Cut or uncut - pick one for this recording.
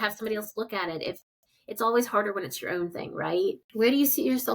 cut